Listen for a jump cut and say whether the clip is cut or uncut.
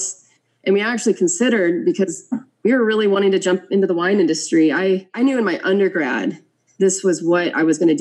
cut